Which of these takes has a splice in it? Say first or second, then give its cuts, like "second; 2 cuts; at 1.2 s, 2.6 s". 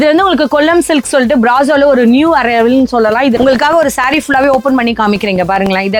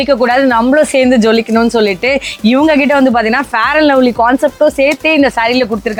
first; 1 cut; at 3.3 s